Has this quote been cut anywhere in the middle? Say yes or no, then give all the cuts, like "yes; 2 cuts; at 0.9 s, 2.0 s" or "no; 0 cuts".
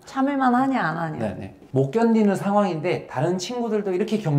yes; 1 cut; at 1.6 s